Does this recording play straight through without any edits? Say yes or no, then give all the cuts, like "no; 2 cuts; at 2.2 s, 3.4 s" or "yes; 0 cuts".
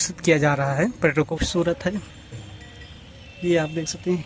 no; 1 cut; at 1.3 s